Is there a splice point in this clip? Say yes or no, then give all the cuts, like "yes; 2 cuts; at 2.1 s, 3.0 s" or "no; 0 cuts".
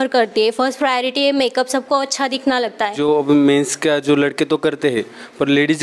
yes; 1 cut; at 3.0 s